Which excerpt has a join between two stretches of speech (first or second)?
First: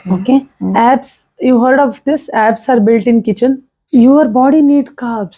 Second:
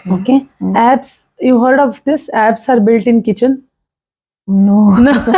first